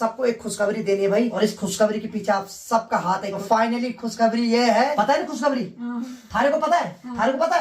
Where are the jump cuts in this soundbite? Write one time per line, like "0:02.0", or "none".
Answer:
0:01.3
0:03.4
0:04.9